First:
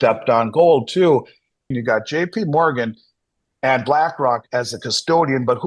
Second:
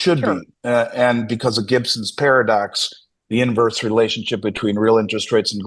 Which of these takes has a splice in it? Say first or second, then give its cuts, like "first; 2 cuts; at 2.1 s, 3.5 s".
first; 1 cut; at 1.7 s